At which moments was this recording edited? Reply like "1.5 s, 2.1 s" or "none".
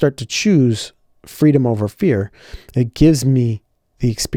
none